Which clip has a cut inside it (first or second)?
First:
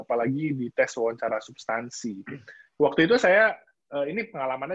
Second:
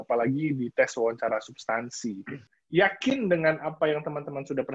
second